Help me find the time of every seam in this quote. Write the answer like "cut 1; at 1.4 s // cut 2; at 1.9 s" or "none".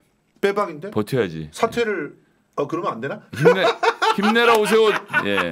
none